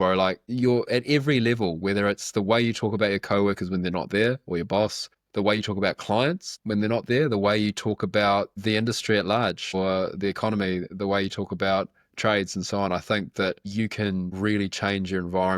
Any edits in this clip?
no; 0 cuts

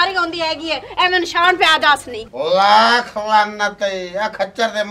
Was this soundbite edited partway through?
yes; 1 cut; at 2.2 s

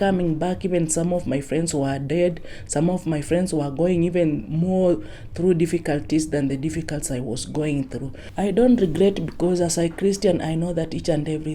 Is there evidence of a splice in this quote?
yes; 1 cut; at 8.2 s

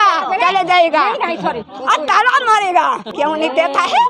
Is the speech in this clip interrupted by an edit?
yes; 1 cut; at 3.1 s

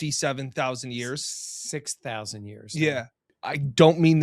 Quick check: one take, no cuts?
no; 1 cut; at 3.2 s

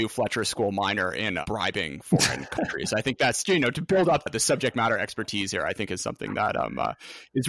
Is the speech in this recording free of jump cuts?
no; 2 cuts; at 1.4 s, 4.3 s

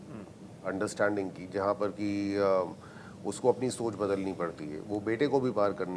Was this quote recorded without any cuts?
yes; 0 cuts

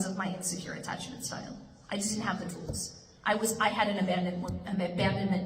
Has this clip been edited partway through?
no; 0 cuts

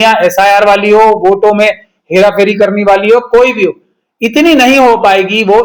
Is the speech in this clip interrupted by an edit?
no; 0 cuts

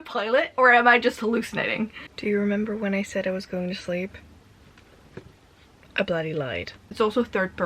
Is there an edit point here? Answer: yes; 2 cuts; at 2.1 s, 6.8 s

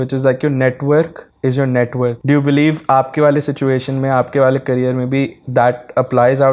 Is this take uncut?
no; 1 cut; at 2.2 s

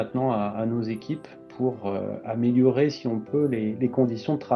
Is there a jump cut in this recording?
no; 0 cuts

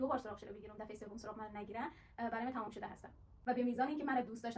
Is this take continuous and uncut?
no; 1 cut; at 3.4 s

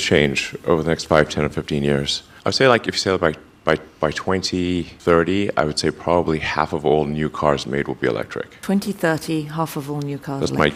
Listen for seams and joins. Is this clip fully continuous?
yes; 0 cuts

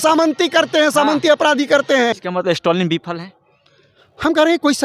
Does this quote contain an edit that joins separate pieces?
yes; 1 cut; at 2.2 s

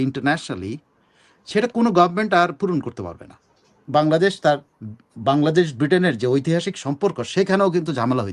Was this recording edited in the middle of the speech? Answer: yes; 1 cut; at 3.8 s

